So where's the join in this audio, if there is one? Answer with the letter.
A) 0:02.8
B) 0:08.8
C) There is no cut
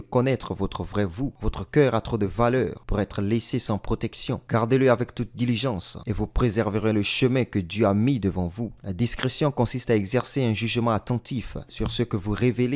B